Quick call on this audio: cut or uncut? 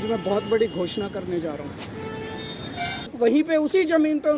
cut